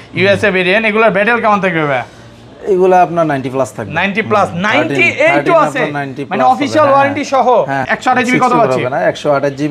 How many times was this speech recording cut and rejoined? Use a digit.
1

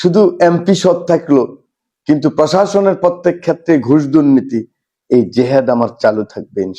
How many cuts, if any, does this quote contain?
0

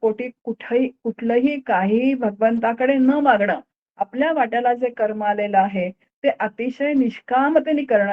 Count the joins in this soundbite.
0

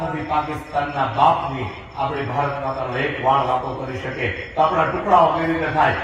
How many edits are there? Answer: 0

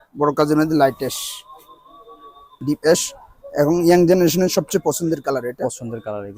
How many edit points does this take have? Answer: 1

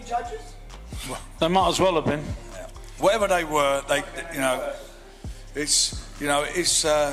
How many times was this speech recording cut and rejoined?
0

